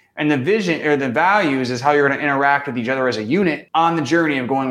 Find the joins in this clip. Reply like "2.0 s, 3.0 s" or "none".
3.6 s

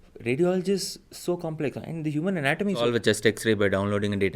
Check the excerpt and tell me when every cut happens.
2.9 s

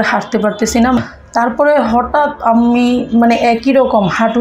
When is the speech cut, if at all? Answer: 1.0 s

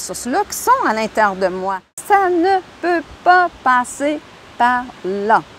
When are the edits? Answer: 1.9 s

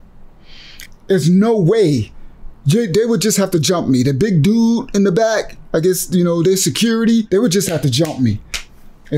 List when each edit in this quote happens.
7.3 s

